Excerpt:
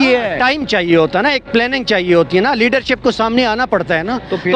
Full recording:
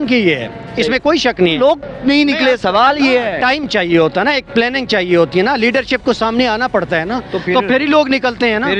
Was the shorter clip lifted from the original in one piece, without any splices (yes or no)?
yes